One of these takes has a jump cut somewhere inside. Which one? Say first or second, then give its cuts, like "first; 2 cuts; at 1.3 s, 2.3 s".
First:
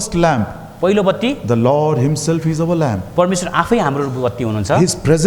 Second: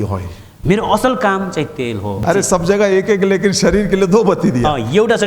second; 1 cut; at 2.2 s